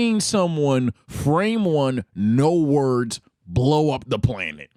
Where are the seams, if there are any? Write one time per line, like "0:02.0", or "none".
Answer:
none